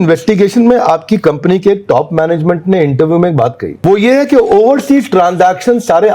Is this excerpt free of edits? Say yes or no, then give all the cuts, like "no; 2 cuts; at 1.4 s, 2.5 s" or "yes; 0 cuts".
no; 1 cut; at 3.8 s